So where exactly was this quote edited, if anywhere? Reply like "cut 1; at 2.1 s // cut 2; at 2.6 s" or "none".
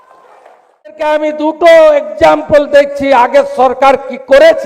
cut 1; at 1.0 s